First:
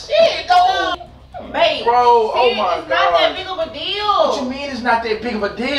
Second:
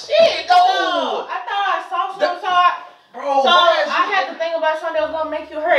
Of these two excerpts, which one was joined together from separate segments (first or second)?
first